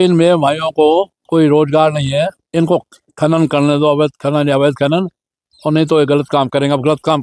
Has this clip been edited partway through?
yes; 2 cuts; at 1.2 s, 2.4 s

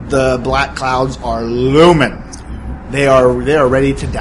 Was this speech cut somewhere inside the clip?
no; 0 cuts

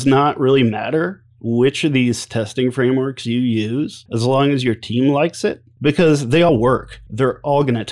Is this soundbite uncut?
no; 3 cuts; at 4.0 s, 5.7 s, 6.5 s

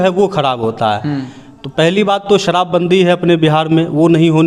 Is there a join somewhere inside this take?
no; 0 cuts

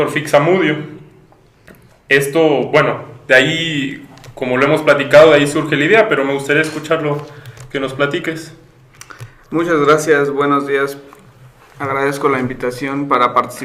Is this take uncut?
no; 1 cut; at 7.8 s

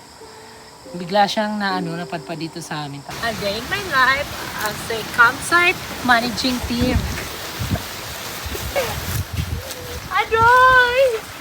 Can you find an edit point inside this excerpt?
yes; 3 cuts; at 3.1 s, 5.9 s, 7.3 s

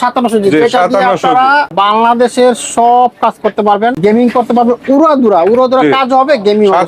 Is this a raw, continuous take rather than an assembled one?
no; 2 cuts; at 1.7 s, 4.0 s

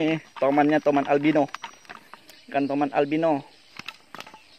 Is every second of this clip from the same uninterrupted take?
yes; 0 cuts

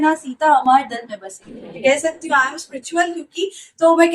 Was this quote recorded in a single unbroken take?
no; 1 cut; at 1.8 s

